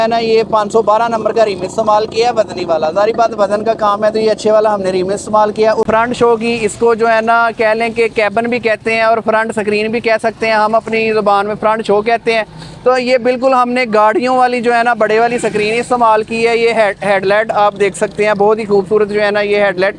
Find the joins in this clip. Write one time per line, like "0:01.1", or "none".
0:05.9